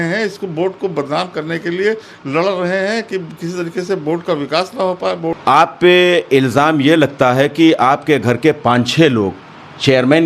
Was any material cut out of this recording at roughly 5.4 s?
yes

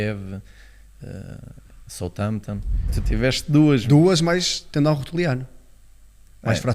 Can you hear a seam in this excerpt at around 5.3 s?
no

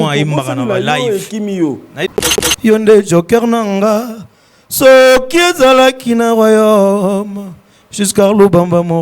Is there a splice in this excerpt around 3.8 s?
no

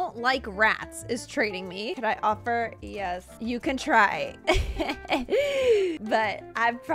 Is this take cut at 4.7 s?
no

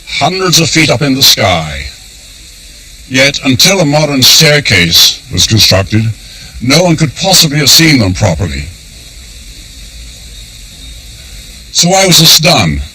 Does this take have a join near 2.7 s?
no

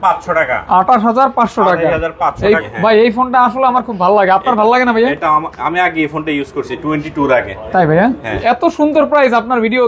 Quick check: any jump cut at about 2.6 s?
yes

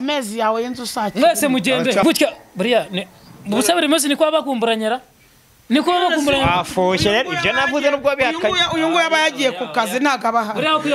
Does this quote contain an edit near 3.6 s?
no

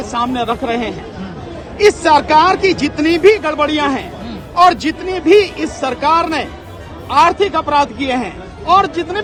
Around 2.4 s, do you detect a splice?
no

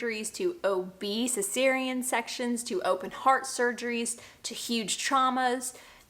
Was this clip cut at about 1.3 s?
no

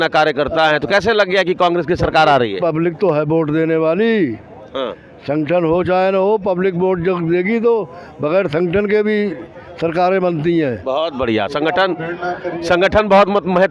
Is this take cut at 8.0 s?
no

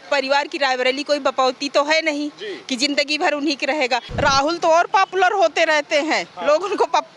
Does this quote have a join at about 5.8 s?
no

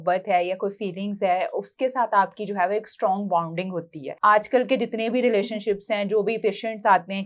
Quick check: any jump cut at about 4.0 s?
yes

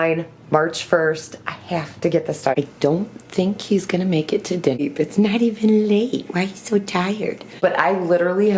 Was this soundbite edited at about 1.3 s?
no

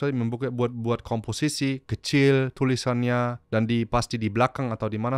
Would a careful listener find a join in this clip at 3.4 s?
yes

